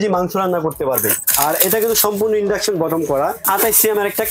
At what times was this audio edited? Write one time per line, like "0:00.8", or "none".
0:01.2
0:03.4